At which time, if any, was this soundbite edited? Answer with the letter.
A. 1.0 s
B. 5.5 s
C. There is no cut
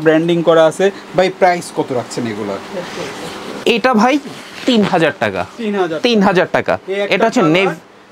C